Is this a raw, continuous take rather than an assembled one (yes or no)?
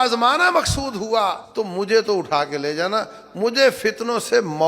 no